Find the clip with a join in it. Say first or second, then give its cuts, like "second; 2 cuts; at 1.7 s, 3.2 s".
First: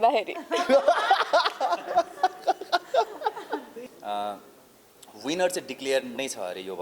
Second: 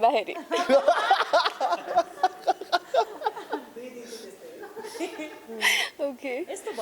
first; 1 cut; at 3.9 s